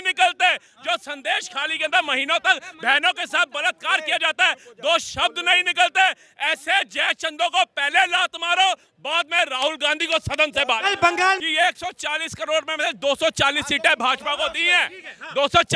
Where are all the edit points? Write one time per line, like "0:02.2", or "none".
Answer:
0:11.4